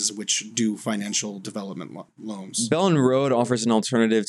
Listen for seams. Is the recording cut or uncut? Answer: cut